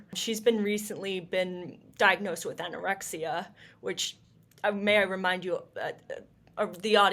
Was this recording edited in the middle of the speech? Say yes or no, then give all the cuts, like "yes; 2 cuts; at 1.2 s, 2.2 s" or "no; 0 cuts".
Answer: no; 0 cuts